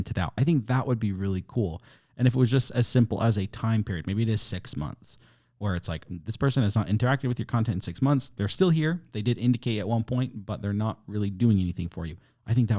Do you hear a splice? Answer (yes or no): no